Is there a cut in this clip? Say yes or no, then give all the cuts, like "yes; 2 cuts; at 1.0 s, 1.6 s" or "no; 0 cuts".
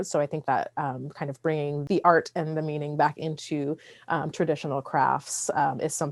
no; 0 cuts